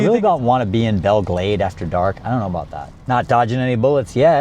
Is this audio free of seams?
no; 1 cut; at 2.7 s

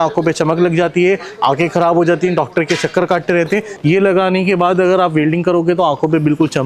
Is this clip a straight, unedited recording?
no; 1 cut; at 3.7 s

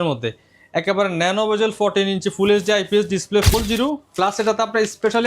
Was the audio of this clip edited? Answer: yes; 1 cut; at 3.5 s

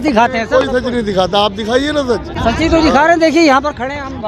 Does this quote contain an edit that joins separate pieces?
no; 0 cuts

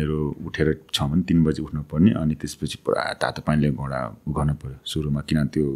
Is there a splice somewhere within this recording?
no; 0 cuts

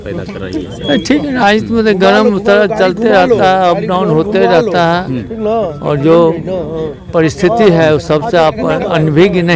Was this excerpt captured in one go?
yes; 0 cuts

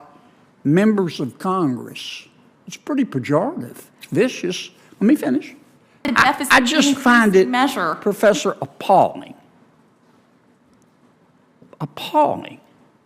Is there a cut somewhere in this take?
yes; 1 cut; at 6.0 s

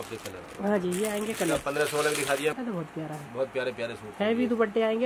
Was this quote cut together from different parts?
yes; 1 cut; at 2.5 s

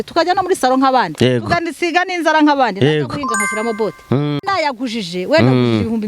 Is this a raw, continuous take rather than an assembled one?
no; 1 cut; at 4.3 s

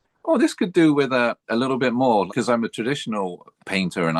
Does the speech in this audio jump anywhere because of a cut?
yes; 1 cut; at 2.3 s

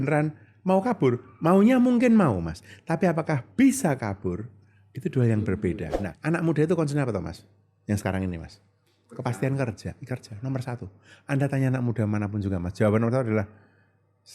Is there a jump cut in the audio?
yes; 1 cut; at 6.0 s

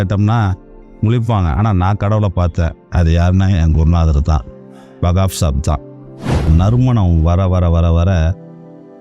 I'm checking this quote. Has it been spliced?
yes; 1 cut; at 6.5 s

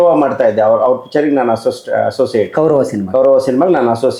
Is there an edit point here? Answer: no; 0 cuts

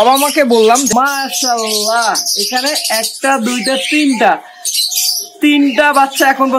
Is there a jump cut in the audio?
yes; 1 cut; at 0.9 s

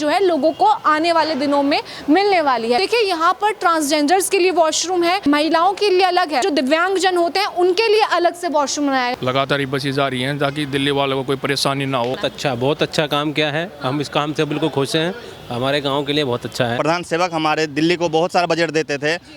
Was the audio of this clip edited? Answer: yes; 5 cuts; at 2.8 s, 6.4 s, 9.1 s, 12.2 s, 16.8 s

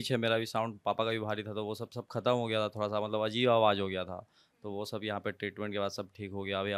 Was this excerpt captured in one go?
yes; 0 cuts

